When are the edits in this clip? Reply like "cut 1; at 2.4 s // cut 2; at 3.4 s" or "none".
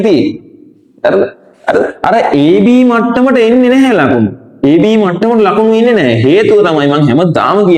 none